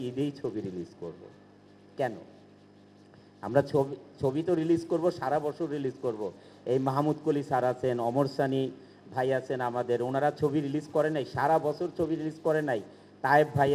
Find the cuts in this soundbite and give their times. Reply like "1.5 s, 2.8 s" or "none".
none